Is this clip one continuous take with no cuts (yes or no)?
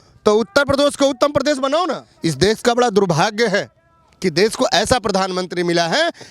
no